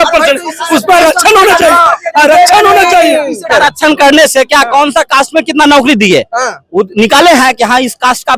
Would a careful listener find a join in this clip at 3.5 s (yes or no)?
yes